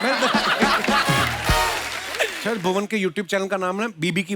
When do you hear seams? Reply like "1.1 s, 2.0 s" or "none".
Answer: 2.4 s